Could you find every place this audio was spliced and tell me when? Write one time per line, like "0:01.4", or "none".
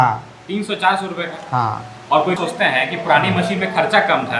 0:02.4